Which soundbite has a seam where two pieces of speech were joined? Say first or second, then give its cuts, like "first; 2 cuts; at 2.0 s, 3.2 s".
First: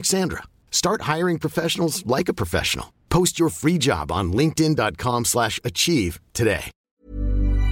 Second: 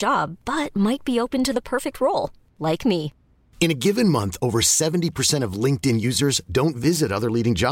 first; 1 cut; at 6.7 s